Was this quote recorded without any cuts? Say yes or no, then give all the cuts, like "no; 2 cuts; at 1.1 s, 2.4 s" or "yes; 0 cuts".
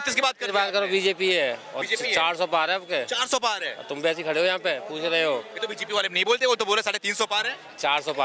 yes; 0 cuts